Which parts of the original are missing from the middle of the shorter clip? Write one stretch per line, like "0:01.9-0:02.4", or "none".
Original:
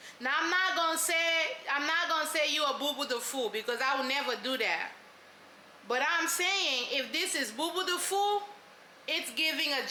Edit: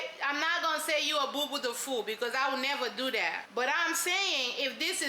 0:04.9-0:05.8